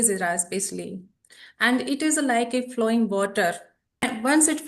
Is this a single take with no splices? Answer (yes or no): yes